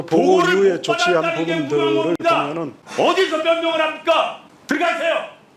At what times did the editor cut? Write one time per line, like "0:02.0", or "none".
0:02.8
0:04.5